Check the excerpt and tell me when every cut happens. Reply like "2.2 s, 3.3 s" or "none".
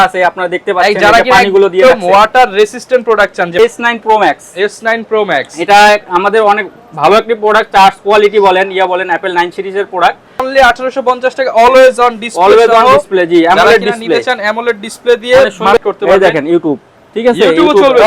3.6 s, 10.5 s, 15.8 s